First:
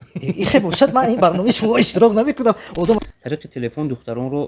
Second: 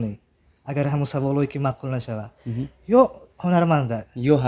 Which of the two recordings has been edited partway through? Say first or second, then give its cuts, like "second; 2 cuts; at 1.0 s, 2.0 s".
first; 1 cut; at 3.0 s